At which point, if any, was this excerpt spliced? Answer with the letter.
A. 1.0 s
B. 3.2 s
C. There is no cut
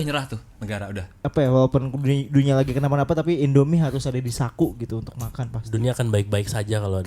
A